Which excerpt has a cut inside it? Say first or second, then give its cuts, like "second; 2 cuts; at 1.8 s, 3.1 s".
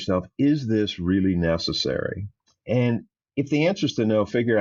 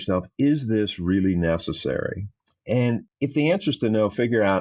second; 1 cut; at 3.1 s